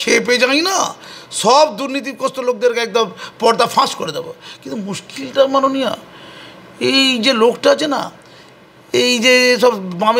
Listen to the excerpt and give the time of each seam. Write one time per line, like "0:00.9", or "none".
none